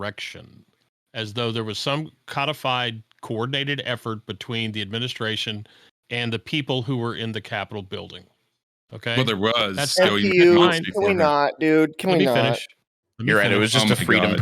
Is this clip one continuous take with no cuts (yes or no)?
yes